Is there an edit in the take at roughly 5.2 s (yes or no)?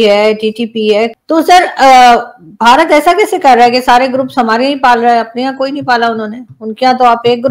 no